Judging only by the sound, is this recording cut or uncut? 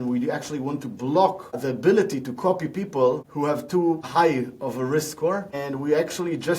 cut